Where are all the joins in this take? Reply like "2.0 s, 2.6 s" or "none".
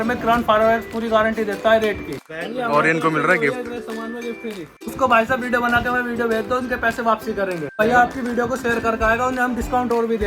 2.3 s, 4.9 s, 7.8 s